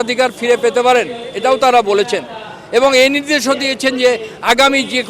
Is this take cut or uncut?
uncut